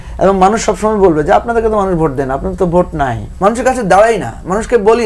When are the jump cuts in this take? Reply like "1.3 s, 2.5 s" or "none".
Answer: 3.2 s